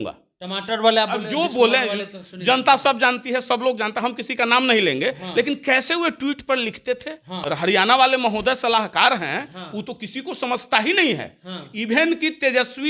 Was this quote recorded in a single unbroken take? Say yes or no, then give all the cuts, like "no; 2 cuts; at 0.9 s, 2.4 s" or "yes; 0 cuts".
no; 1 cut; at 7.4 s